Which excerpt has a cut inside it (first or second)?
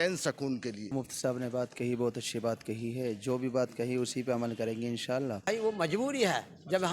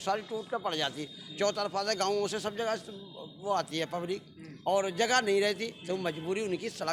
first